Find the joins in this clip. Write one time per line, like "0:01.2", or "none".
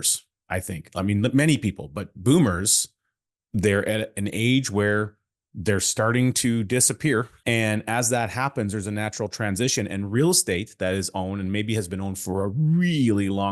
0:07.3